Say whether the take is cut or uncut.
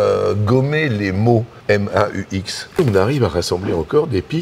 cut